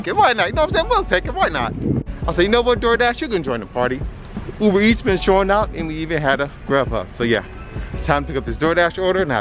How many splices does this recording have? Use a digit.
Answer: 1